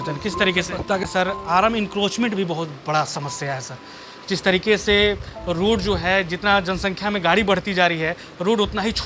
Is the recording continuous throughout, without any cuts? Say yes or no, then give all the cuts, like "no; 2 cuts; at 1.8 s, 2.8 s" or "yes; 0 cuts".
no; 1 cut; at 1.0 s